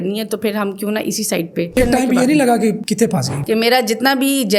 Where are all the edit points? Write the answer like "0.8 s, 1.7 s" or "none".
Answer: 1.7 s, 3.4 s